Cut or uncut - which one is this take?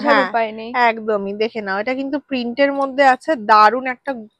uncut